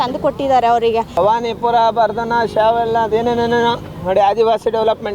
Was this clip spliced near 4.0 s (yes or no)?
no